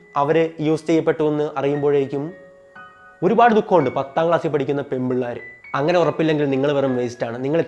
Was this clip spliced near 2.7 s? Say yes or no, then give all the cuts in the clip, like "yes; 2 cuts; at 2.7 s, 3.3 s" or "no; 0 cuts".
no; 1 cut; at 5.5 s